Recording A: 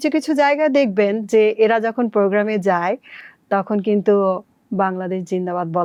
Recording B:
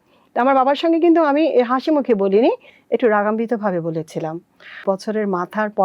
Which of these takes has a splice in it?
B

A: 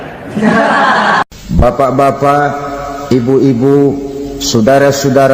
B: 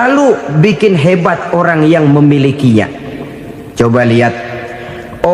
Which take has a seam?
A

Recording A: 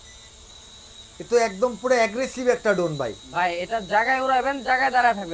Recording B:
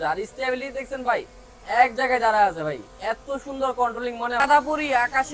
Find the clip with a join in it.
B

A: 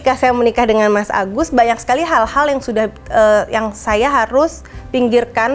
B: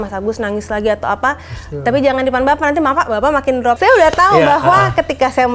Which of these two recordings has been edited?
B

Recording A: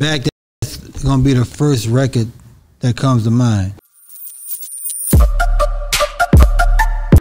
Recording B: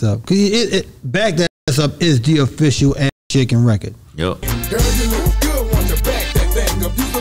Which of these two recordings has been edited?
A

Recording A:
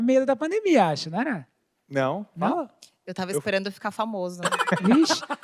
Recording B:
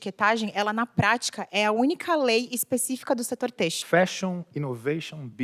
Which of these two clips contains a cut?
B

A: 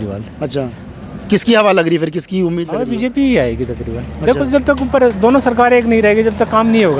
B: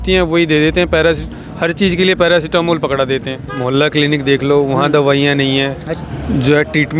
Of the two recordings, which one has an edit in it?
B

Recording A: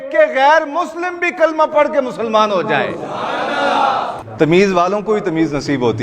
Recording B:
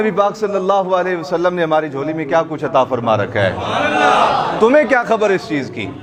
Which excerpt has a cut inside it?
A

